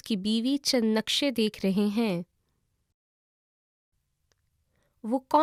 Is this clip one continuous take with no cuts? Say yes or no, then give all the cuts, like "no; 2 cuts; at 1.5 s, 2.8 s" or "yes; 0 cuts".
yes; 0 cuts